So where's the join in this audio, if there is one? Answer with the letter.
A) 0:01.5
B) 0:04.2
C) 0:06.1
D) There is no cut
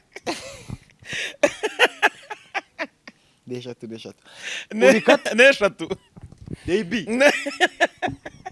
D